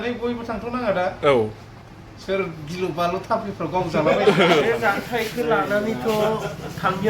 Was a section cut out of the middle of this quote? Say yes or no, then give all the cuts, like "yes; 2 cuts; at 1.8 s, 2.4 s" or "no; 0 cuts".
yes; 1 cut; at 4.6 s